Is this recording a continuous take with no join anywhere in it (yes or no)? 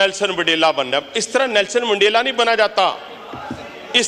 yes